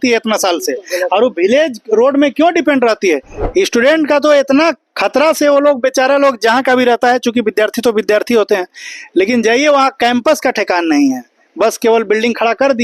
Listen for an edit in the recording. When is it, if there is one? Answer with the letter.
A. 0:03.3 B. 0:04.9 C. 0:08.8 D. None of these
A